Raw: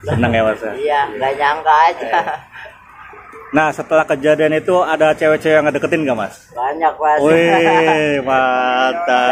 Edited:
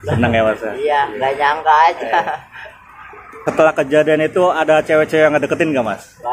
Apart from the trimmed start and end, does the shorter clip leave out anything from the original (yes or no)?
yes